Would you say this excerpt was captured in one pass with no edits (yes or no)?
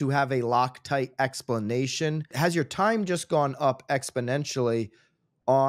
no